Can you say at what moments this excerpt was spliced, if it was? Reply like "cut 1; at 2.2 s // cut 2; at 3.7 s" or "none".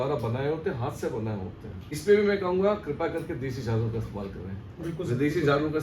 cut 1; at 2.0 s